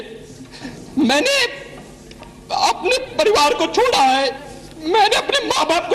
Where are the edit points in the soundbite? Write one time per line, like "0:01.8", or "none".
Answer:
none